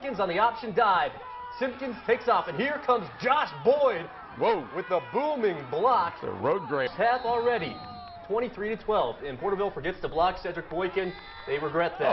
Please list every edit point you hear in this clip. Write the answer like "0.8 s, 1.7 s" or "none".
none